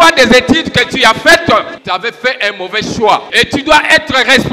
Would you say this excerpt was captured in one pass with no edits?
no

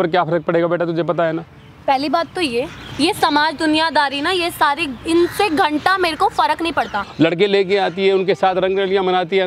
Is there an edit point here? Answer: yes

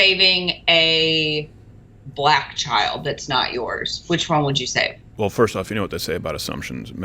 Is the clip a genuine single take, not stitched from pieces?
no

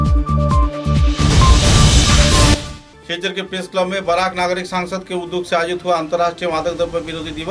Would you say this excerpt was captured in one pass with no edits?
no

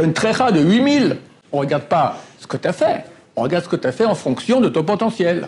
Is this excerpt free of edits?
no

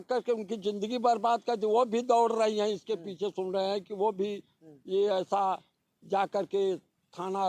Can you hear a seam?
no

